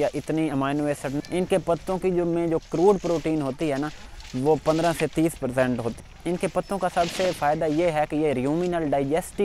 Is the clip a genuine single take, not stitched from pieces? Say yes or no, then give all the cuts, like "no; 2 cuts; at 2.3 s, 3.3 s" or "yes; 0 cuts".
no; 2 cuts; at 1.2 s, 6.0 s